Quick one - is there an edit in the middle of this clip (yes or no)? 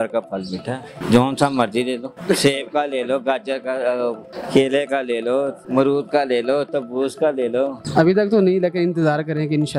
yes